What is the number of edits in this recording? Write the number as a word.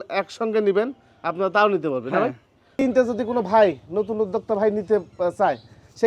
one